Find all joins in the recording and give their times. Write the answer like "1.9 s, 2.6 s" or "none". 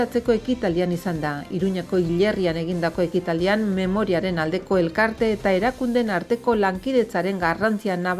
none